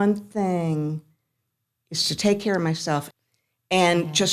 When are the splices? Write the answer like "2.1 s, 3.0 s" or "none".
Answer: 3.1 s

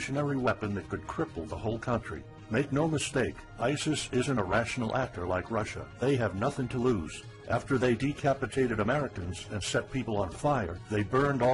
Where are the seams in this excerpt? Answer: 4.3 s

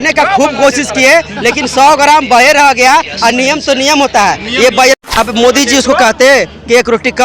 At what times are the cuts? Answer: 4.9 s

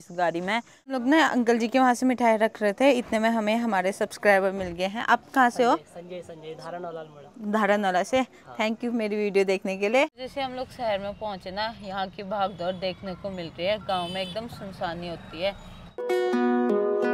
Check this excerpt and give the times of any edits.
0.8 s, 10.2 s, 15.9 s

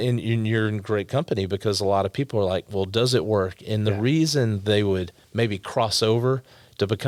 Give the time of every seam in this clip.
none

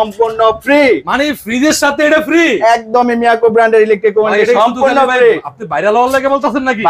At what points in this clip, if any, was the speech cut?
none

